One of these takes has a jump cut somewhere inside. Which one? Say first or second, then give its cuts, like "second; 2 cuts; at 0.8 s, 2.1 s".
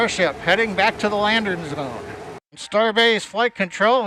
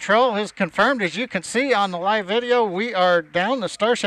first; 1 cut; at 2.5 s